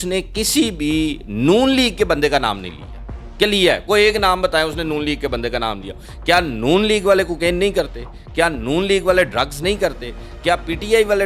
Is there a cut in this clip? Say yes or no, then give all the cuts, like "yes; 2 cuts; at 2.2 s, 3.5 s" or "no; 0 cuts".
no; 0 cuts